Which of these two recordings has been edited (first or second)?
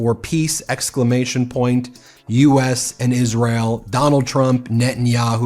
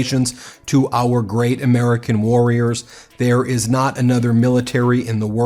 first